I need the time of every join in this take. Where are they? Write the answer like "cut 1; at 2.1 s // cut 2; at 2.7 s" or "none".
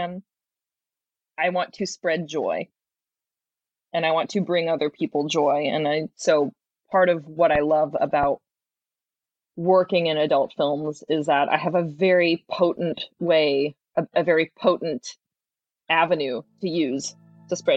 cut 1; at 15.1 s